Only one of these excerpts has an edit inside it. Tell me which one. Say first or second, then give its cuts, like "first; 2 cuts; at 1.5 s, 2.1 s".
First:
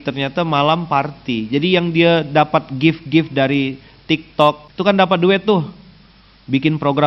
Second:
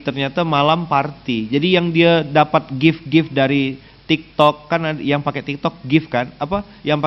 first; 1 cut; at 4.6 s